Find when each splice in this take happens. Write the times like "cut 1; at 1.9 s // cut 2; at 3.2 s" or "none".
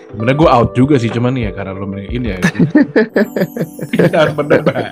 none